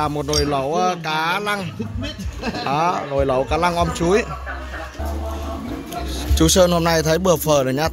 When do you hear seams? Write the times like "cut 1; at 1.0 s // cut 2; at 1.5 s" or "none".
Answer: cut 1; at 4.9 s